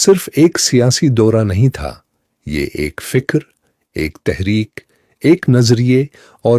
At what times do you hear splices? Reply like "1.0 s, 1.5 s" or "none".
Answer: 5.6 s